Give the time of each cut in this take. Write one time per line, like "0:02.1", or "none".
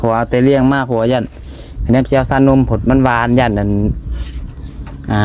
none